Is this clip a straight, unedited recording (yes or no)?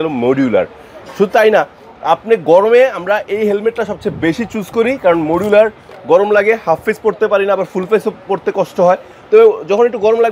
yes